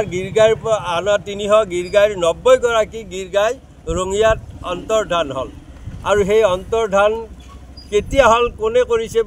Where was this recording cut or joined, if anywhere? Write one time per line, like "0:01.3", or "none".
none